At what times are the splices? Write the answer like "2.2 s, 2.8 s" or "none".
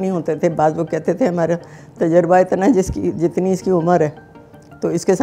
none

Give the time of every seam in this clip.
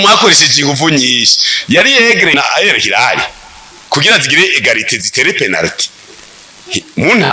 2.3 s

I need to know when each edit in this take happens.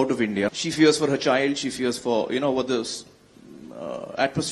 none

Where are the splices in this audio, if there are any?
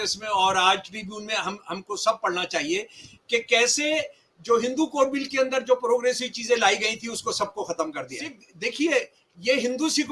8.4 s

